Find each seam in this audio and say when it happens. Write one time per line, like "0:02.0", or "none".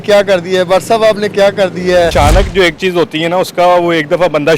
0:02.1